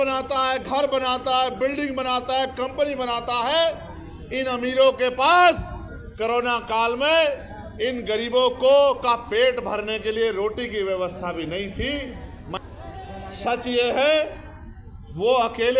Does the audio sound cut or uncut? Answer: cut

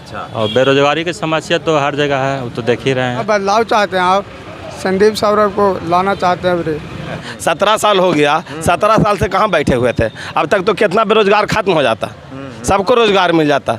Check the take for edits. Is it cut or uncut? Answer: cut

